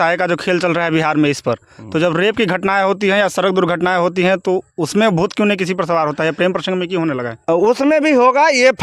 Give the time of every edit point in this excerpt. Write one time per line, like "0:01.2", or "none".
none